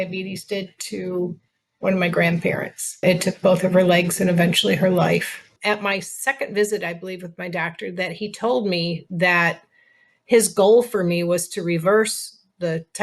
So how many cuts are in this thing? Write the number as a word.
two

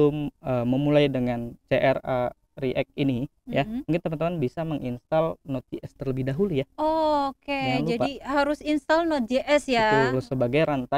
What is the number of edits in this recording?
zero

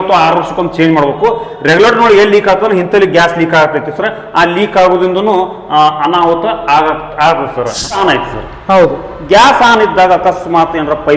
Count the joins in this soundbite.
one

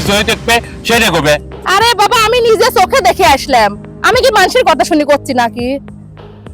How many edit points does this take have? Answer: zero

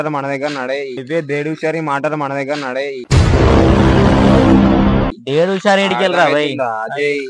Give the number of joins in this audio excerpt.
three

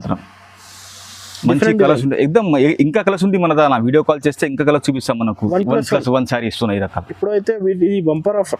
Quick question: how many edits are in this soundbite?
one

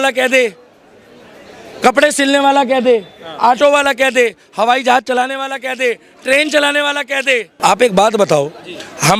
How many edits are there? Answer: one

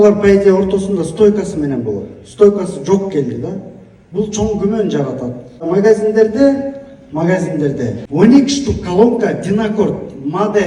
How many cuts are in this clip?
one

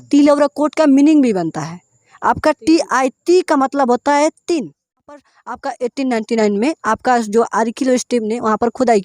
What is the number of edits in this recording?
one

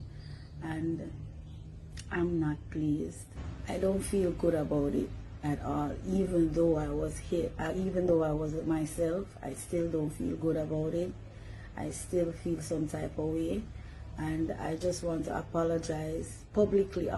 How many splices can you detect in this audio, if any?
zero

